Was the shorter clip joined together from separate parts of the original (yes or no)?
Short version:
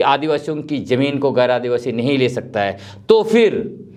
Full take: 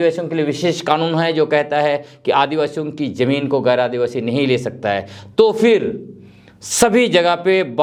no